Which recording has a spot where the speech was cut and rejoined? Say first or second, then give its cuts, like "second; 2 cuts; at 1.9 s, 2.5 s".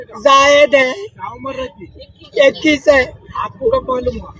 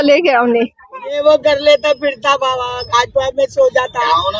second; 1 cut; at 1.2 s